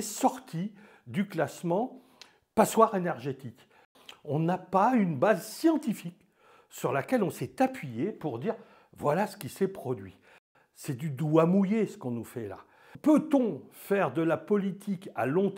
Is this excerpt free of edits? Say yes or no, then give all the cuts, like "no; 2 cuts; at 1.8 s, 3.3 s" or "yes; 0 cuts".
no; 3 cuts; at 3.9 s, 10.4 s, 12.9 s